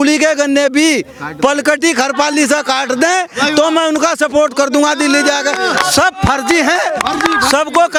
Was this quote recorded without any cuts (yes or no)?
yes